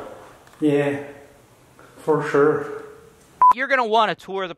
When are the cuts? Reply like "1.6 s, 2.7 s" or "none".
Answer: 3.6 s